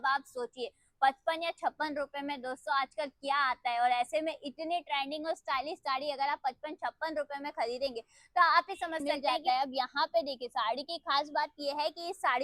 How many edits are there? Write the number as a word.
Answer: one